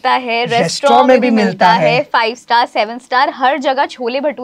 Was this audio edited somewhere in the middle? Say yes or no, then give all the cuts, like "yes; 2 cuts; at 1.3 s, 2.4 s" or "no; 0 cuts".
no; 0 cuts